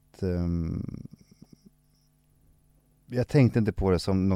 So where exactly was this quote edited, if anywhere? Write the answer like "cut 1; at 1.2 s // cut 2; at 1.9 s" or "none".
cut 1; at 2.7 s